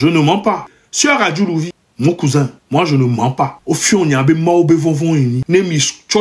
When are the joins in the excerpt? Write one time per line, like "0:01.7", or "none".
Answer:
0:02.6
0:03.6
0:05.4